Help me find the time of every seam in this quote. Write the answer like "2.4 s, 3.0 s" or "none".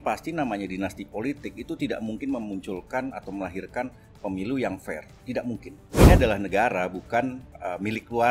5.9 s